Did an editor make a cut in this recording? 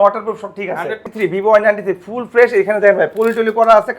yes; 1 cut; at 1.1 s

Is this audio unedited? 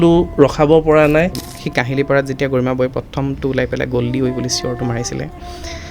no; 1 cut; at 1.3 s

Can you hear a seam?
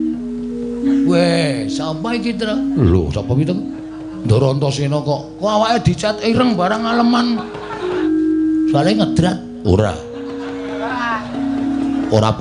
yes; 1 cut; at 8.0 s

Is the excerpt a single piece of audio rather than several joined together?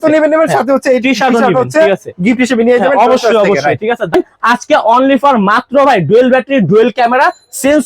no; 1 cut; at 4.1 s

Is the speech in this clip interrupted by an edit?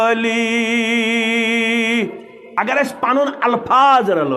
yes; 1 cut; at 2.4 s

